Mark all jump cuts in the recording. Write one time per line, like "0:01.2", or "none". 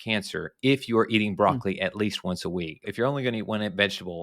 0:02.9